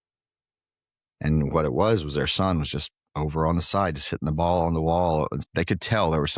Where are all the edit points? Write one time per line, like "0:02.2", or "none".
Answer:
0:05.4